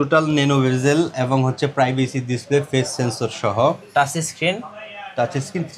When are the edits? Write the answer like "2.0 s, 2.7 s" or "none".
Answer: none